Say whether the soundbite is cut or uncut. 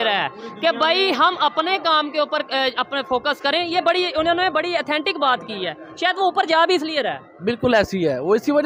uncut